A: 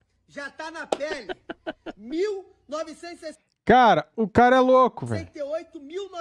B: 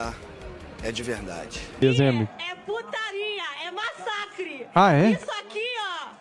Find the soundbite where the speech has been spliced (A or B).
B